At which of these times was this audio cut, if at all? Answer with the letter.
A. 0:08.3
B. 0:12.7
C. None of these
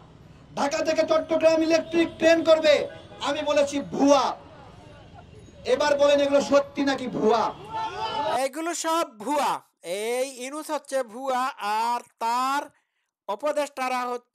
C